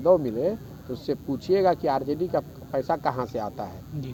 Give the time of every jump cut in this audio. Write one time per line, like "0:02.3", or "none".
none

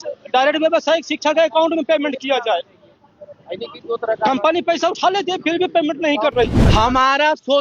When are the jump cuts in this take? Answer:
0:06.6

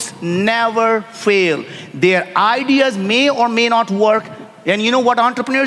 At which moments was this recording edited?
none

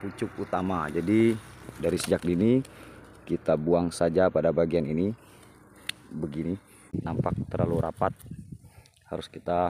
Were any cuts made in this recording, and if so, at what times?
0:06.9

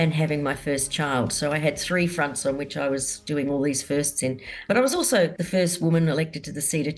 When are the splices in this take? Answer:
0:04.7
0:05.4

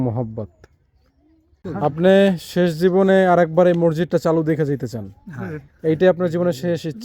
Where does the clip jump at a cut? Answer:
0:01.6

